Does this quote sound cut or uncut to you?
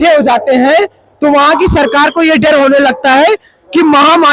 uncut